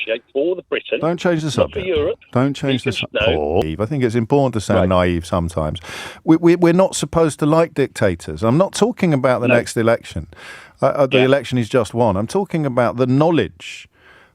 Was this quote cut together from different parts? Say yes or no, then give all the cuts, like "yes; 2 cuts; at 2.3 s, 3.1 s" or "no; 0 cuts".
yes; 1 cut; at 3.6 s